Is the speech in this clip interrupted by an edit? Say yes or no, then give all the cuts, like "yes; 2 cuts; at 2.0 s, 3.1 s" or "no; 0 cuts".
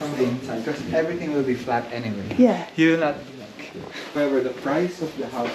yes; 1 cut; at 4.2 s